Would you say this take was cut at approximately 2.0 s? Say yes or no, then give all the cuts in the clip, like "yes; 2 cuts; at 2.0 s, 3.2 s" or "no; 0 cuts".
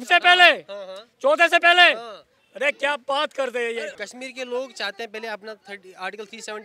no; 1 cut; at 4.0 s